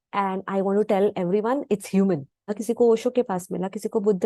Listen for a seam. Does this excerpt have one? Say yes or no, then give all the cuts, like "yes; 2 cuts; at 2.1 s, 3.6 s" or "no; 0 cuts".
yes; 1 cut; at 2.5 s